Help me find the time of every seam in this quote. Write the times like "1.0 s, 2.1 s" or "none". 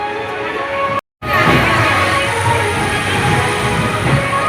none